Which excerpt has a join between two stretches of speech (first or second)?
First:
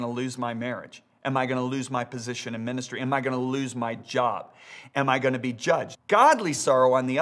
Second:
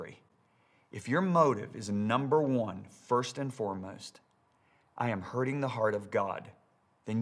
first